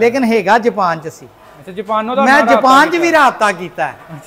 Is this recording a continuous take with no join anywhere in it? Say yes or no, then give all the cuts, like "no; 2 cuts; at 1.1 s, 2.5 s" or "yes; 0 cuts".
yes; 0 cuts